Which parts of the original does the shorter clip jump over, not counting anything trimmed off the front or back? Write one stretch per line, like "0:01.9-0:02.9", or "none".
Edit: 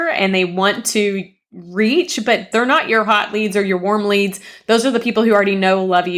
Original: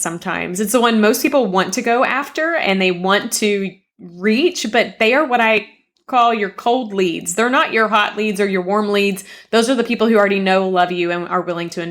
0:04.9-0:07.3